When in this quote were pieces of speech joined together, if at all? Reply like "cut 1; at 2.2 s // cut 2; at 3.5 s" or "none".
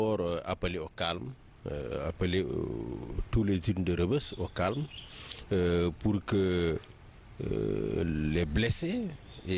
cut 1; at 4.9 s